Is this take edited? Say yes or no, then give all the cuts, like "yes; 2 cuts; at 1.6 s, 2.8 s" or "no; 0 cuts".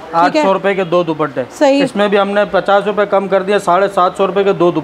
no; 0 cuts